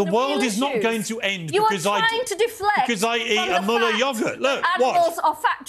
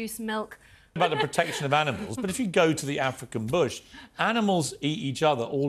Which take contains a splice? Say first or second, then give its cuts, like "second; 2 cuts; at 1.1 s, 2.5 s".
second; 1 cut; at 1.0 s